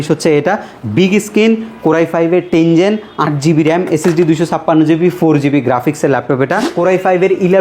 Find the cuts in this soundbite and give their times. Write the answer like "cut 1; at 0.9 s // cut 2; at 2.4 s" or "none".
cut 1; at 6.6 s